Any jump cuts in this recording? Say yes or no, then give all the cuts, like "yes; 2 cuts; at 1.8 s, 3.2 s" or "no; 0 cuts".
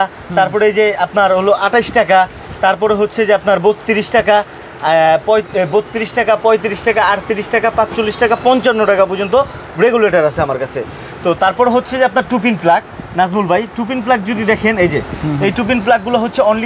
no; 0 cuts